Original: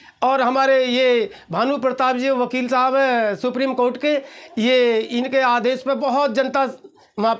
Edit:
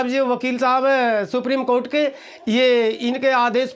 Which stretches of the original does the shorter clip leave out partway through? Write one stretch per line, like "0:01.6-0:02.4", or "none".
none